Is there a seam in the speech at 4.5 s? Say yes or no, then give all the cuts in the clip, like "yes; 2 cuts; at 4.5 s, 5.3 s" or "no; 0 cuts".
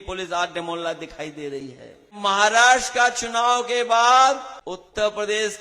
yes; 2 cuts; at 2.1 s, 4.5 s